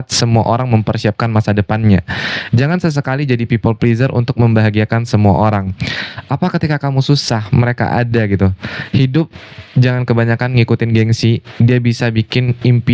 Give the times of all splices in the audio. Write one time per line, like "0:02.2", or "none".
none